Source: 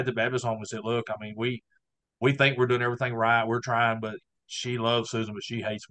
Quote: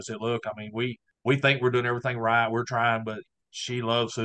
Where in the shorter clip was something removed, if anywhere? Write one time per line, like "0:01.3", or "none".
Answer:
0:01.1